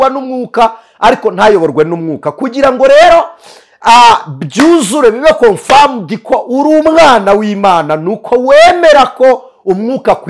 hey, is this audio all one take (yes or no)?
yes